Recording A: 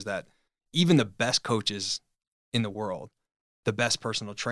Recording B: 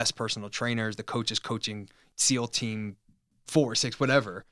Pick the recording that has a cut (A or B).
B